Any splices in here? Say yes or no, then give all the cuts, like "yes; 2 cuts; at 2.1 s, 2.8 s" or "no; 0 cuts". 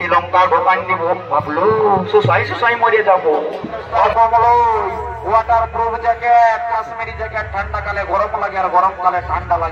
yes; 1 cut; at 4.1 s